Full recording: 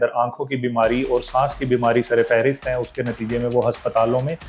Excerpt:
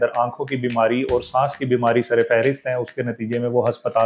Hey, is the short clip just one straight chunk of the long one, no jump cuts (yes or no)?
yes